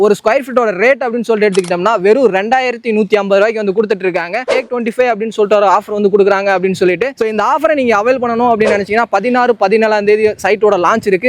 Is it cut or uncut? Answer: cut